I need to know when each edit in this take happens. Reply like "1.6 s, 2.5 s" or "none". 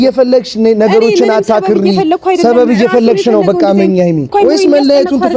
4.3 s